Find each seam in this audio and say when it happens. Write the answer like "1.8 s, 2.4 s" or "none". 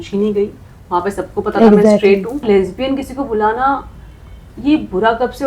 2.4 s